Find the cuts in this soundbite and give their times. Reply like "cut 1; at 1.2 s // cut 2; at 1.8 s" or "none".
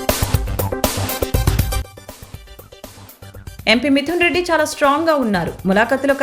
cut 1; at 3.5 s